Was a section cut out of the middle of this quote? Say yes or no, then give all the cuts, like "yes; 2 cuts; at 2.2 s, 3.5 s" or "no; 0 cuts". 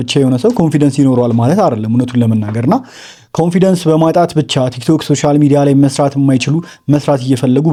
no; 0 cuts